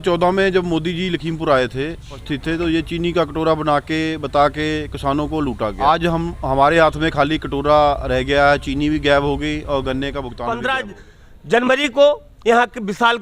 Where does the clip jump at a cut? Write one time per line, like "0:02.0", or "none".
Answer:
0:02.3
0:05.8
0:10.3